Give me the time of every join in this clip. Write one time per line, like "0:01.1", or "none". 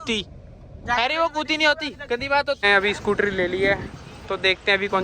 0:02.6